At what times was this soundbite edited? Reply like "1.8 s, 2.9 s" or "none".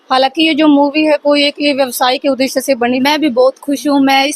3.0 s